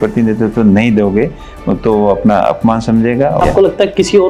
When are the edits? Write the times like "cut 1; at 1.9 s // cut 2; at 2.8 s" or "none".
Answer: cut 1; at 3.4 s